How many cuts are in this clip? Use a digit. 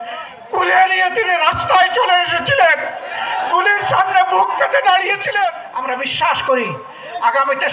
1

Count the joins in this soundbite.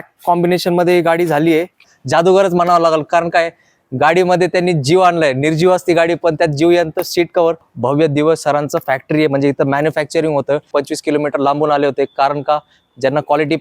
3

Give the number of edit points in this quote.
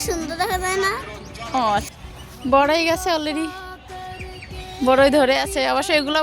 1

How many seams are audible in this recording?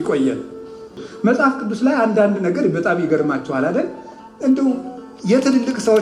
1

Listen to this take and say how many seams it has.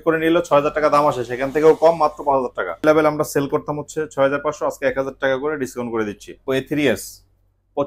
2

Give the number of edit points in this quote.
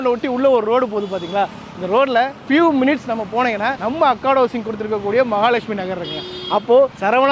0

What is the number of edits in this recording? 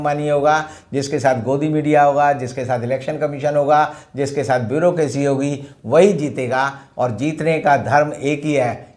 0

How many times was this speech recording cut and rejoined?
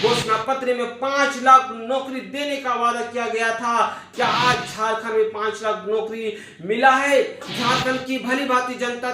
1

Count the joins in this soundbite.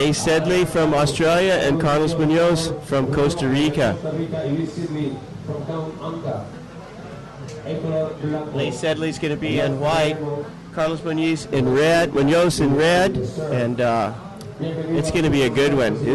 1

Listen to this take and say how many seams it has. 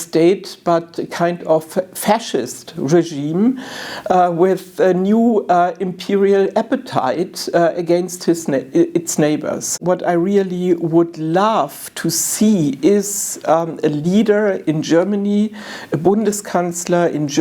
1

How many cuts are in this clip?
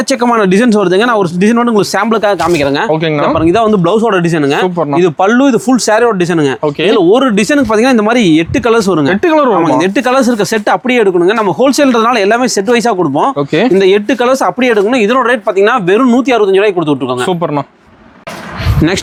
0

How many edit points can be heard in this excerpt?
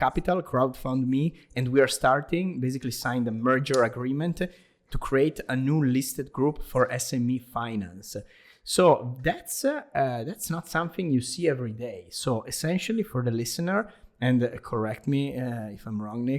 0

